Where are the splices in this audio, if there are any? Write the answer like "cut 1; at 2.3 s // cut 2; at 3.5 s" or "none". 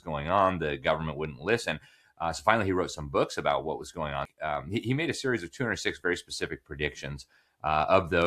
cut 1; at 4.3 s